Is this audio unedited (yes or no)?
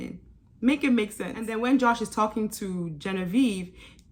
yes